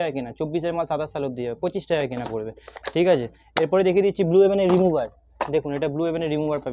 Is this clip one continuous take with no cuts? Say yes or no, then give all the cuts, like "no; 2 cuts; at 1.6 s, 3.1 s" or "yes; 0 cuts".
yes; 0 cuts